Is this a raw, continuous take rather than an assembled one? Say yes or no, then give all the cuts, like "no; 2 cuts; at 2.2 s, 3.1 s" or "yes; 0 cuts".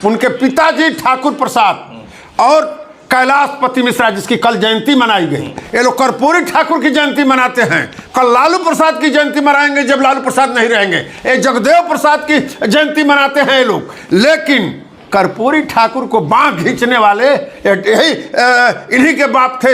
yes; 0 cuts